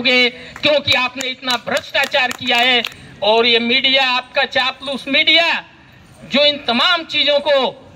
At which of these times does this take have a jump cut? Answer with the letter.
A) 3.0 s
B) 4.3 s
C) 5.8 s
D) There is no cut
A